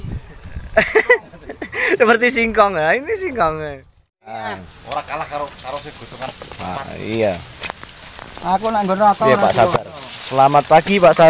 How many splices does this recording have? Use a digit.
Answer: 1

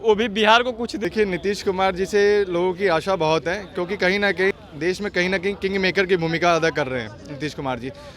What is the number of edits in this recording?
2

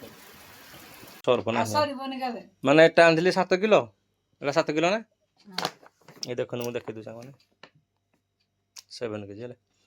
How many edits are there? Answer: 1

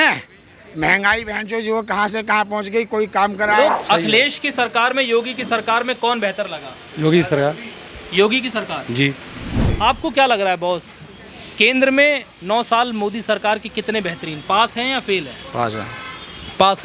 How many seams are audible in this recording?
2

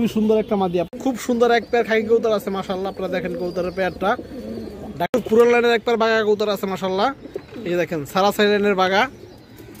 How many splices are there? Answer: 2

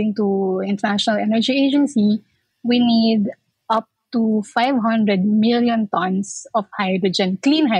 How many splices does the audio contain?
0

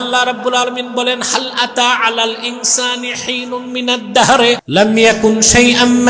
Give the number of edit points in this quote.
1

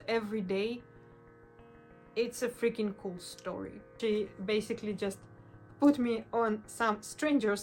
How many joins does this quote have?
1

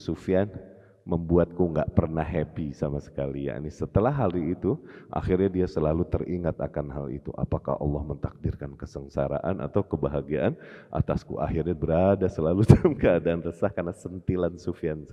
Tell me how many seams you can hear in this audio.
0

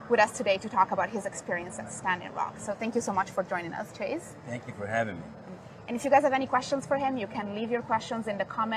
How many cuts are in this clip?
1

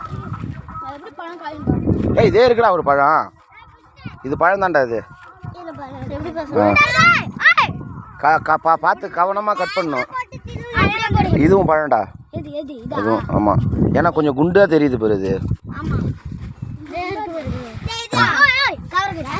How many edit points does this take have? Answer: 0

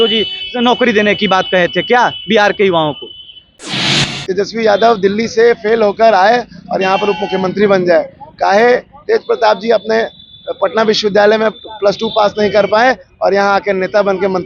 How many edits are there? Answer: 1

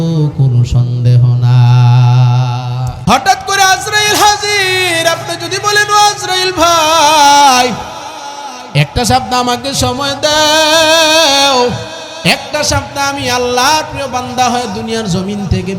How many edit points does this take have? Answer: 1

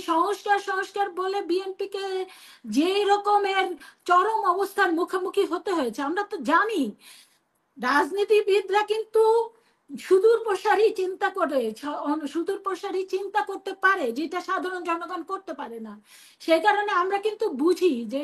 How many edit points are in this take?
0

